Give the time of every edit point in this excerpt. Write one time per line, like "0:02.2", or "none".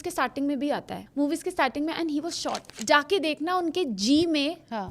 0:01.0
0:02.7

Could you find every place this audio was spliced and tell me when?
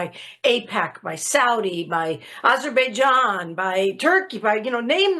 none

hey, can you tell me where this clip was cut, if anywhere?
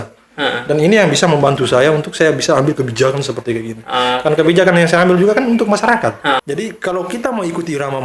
0:06.4

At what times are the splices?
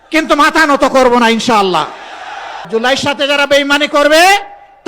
0:02.7

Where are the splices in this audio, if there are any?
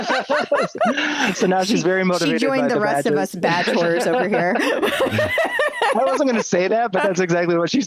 none

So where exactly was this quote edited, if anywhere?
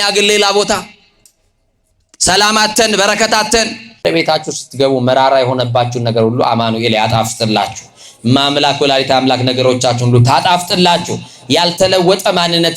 0:04.0

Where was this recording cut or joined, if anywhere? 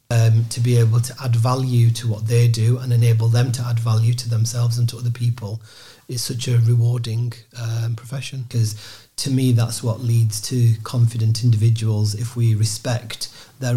0:08.4

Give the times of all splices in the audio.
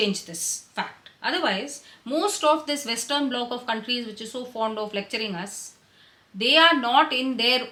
none

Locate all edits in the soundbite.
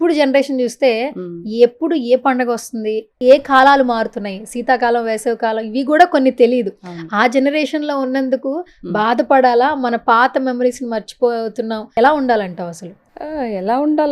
none

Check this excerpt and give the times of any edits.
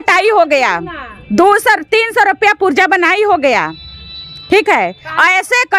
none

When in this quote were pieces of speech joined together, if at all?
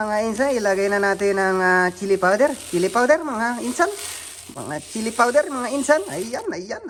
none

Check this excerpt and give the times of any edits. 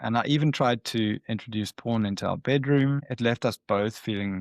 0:03.1

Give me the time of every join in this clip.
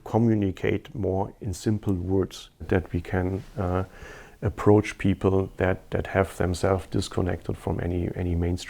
0:02.7

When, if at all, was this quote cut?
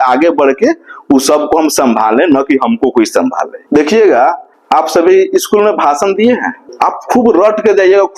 0:03.5
0:04.5
0:06.6

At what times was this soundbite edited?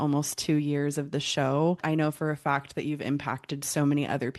0:01.8

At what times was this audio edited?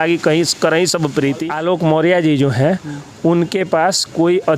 0:01.5

